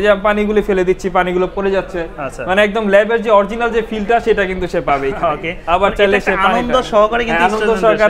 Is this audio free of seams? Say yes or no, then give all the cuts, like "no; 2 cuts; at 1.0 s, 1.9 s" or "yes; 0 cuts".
yes; 0 cuts